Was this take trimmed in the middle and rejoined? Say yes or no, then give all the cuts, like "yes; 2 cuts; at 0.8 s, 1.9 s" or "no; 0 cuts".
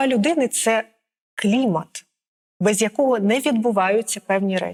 no; 0 cuts